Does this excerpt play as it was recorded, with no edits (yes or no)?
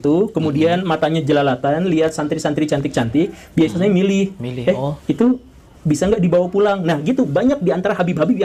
yes